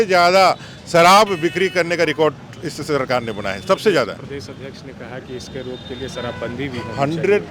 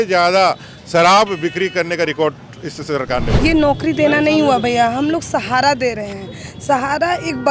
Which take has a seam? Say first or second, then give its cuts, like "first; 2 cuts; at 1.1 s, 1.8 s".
second; 1 cut; at 3.4 s